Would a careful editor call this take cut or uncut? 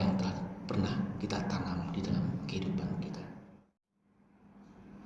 cut